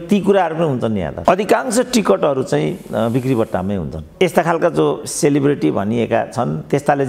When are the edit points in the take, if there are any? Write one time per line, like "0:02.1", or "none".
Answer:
0:01.1
0:04.2